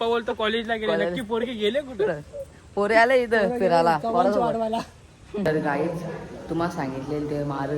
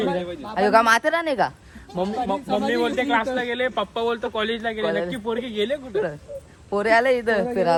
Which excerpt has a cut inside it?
first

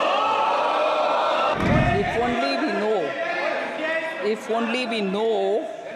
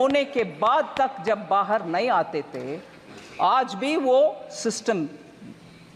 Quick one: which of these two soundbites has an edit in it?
first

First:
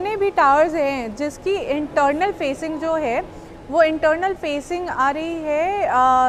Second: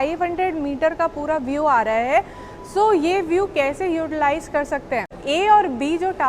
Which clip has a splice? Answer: second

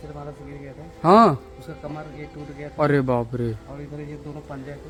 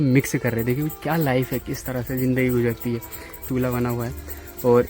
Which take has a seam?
second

